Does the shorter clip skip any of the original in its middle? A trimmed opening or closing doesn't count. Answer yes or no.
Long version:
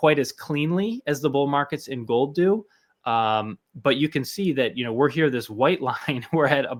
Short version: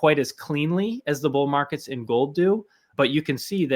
yes